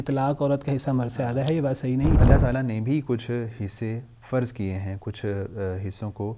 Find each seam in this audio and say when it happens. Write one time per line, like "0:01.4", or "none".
0:02.2